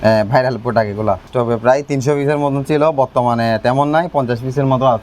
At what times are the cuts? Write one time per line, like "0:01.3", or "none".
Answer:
0:01.3